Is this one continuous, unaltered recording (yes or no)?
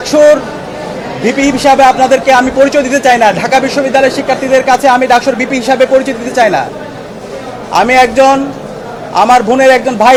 yes